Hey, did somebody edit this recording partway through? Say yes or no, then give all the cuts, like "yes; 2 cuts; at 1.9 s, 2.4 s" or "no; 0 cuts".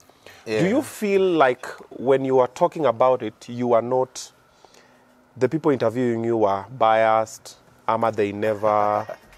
no; 0 cuts